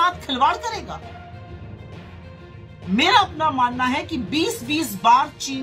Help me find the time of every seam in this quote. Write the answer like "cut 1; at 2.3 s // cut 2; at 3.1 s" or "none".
cut 1; at 1.2 s // cut 2; at 2.9 s